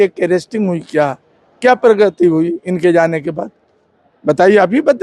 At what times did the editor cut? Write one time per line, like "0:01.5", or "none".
none

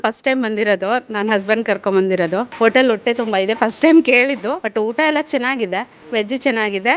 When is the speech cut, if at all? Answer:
0:02.5
0:04.6
0:06.0

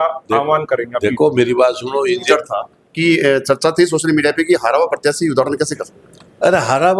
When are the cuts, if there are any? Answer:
0:02.2

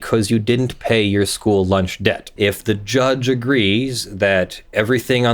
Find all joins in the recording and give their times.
0:02.3

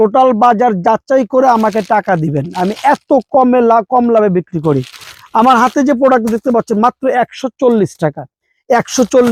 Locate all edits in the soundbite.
none

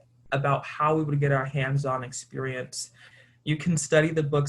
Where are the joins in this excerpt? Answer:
0:03.0

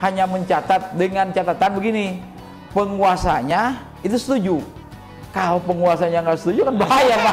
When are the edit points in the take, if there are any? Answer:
none

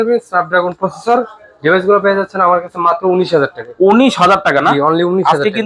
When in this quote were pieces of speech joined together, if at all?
none

